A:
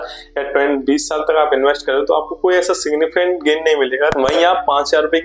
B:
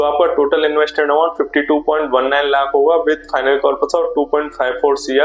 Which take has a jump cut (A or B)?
A